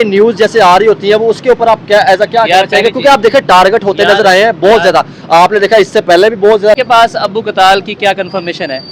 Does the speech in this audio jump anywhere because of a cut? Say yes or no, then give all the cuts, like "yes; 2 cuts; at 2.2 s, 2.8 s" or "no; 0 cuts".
yes; 1 cut; at 6.8 s